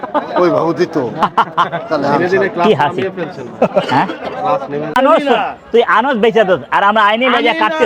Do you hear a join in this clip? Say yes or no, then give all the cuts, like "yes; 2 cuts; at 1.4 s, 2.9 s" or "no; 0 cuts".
yes; 1 cut; at 4.9 s